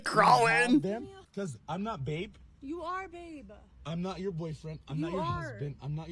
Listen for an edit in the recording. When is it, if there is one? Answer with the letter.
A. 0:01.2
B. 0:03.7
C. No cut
A